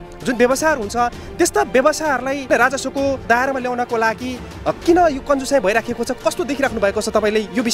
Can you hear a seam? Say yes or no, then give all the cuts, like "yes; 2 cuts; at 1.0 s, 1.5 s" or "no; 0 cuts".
no; 0 cuts